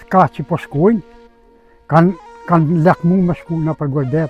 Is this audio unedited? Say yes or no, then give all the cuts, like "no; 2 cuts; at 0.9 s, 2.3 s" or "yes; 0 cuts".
yes; 0 cuts